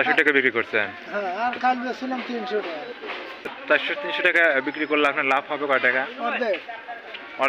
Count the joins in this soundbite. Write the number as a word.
one